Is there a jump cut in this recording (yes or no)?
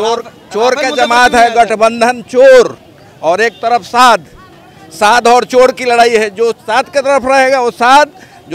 yes